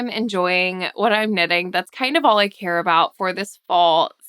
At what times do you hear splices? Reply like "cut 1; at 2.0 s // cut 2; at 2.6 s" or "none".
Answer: none